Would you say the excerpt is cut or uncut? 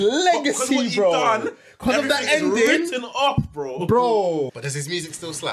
cut